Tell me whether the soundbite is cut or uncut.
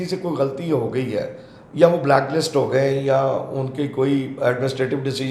uncut